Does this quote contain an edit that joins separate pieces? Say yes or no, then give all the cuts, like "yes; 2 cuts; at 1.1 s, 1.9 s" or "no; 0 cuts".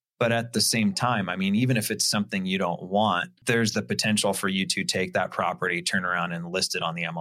yes; 1 cut; at 3.3 s